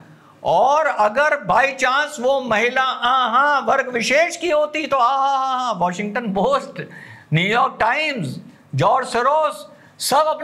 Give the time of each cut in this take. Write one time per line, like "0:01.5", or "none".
none